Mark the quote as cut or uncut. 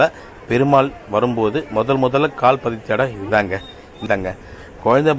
cut